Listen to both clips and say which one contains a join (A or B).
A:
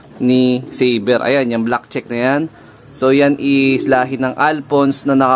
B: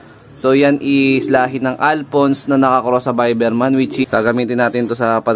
B